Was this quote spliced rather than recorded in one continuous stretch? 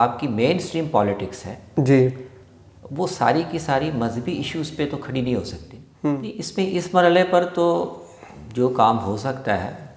yes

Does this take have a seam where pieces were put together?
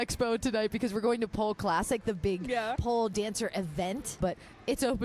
yes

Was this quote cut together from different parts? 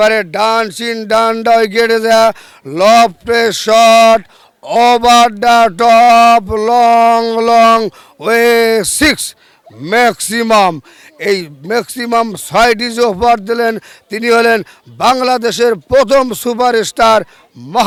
no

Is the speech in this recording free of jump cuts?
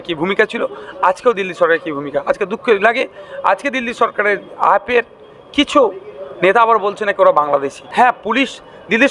no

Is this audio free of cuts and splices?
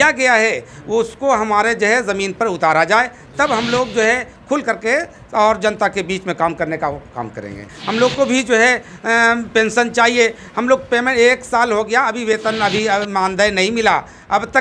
no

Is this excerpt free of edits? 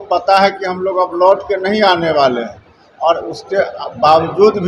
yes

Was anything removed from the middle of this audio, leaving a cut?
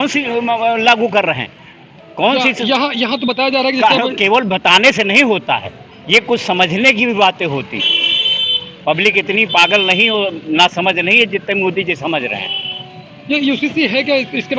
no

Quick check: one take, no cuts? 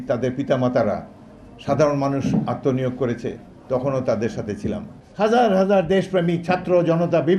no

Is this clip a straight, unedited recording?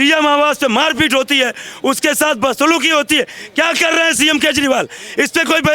yes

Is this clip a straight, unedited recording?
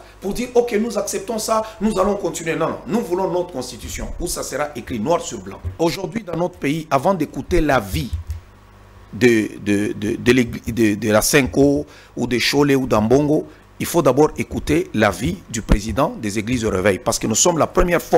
no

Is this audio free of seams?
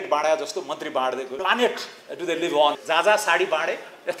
no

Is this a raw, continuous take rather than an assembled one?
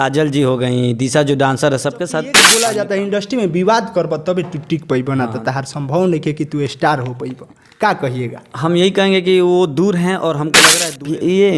no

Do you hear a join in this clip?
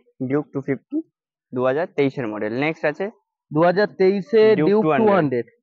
no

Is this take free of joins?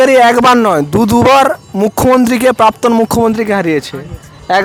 yes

